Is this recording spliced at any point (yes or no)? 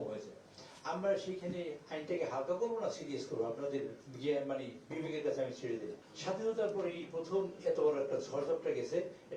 yes